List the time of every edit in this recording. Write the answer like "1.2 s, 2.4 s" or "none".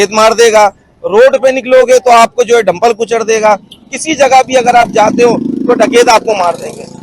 3.8 s